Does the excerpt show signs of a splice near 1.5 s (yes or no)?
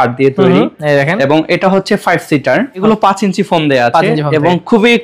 no